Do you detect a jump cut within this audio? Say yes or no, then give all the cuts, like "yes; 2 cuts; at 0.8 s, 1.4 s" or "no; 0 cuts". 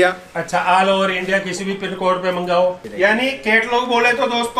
yes; 1 cut; at 2.8 s